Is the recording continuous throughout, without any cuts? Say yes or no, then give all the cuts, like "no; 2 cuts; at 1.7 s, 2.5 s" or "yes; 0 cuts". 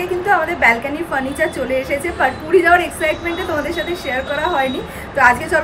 yes; 0 cuts